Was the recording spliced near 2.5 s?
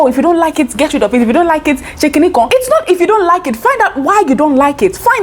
yes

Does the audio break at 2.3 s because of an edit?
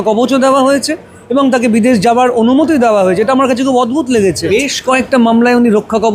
no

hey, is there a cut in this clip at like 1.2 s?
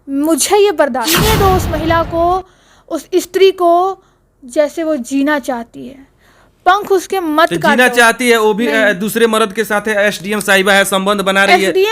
yes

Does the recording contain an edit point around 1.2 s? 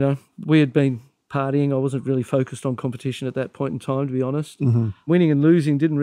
no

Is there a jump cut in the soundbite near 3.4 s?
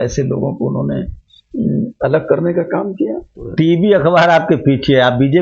yes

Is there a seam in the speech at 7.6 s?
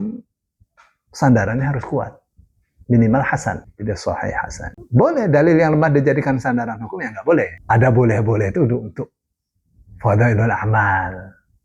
yes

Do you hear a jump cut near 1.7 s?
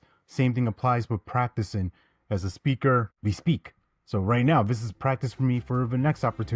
no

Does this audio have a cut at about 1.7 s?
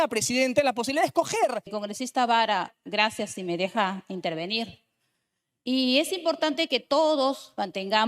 yes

